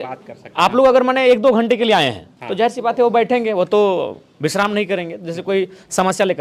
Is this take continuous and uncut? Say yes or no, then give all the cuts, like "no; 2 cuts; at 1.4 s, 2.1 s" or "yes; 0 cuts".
yes; 0 cuts